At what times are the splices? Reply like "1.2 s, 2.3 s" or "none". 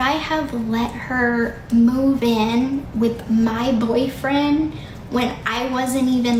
none